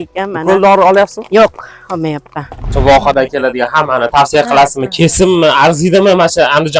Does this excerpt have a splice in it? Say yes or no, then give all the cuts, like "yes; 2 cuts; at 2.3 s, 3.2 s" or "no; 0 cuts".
yes; 1 cut; at 2.7 s